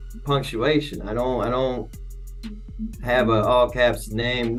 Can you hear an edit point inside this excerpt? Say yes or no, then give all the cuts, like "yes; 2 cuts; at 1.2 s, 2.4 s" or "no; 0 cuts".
no; 0 cuts